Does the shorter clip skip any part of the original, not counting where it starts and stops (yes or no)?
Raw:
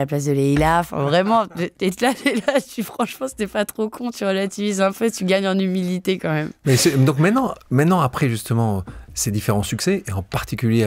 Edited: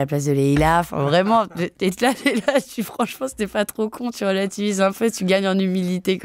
no